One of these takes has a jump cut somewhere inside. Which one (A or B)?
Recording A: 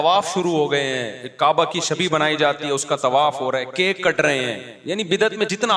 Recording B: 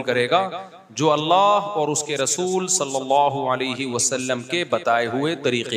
A